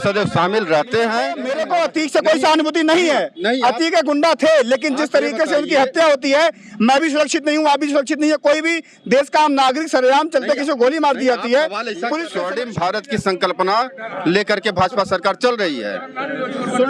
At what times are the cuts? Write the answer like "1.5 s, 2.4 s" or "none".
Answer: 1.5 s, 12.3 s